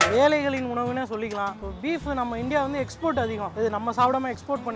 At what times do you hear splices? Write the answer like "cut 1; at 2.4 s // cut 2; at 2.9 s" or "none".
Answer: cut 1; at 1.5 s